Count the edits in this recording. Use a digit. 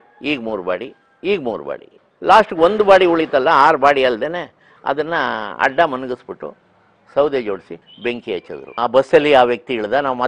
1